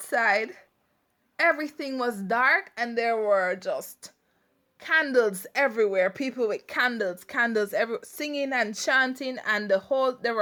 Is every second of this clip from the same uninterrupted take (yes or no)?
yes